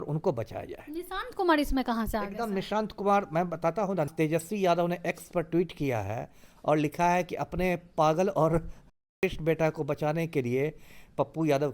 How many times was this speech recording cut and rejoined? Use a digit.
1